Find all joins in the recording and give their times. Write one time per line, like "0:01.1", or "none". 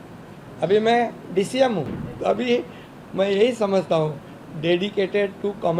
0:02.0